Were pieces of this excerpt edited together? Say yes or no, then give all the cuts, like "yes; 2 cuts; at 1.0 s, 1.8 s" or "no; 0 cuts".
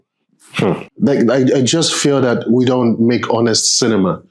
yes; 1 cut; at 0.9 s